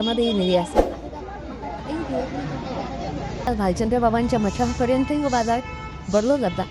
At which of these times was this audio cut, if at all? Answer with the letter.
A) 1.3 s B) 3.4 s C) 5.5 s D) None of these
B